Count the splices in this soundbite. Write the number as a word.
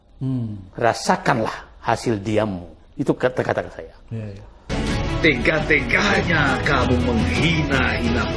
one